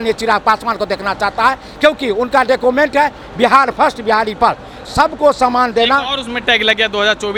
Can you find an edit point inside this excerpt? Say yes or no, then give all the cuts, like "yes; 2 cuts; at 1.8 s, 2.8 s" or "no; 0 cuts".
no; 0 cuts